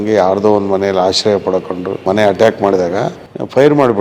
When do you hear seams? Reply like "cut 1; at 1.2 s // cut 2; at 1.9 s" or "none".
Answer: cut 1; at 2.0 s

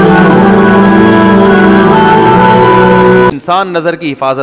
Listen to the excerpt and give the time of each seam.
cut 1; at 3.3 s

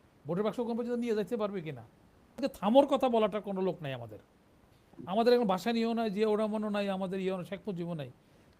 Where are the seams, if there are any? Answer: cut 1; at 2.4 s

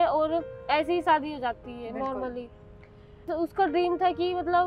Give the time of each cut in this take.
cut 1; at 3.3 s

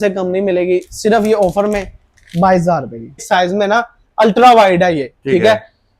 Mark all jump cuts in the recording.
cut 1; at 3.2 s

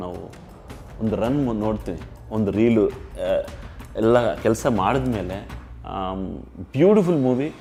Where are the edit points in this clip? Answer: none

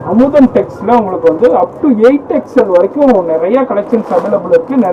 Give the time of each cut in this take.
none

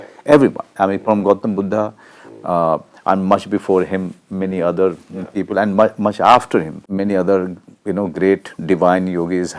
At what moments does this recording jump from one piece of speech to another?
cut 1; at 6.8 s

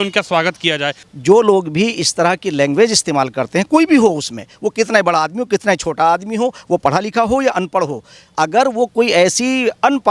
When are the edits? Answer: cut 1; at 1.0 s

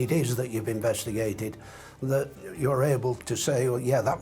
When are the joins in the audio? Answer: cut 1; at 2.4 s // cut 2; at 3.2 s

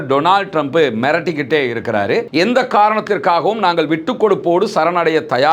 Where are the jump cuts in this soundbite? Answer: cut 1; at 2.3 s

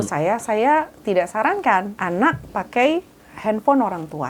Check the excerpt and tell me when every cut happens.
cut 1; at 1.9 s

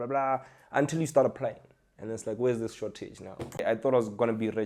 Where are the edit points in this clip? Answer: cut 1; at 3.6 s

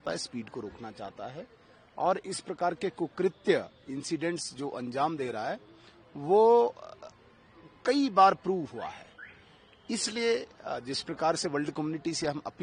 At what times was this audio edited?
none

